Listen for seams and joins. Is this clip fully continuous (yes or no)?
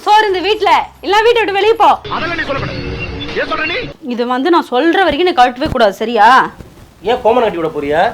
no